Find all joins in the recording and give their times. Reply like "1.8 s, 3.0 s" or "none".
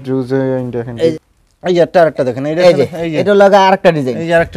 1.1 s